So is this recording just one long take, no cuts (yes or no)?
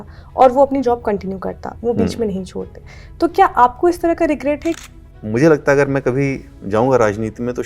no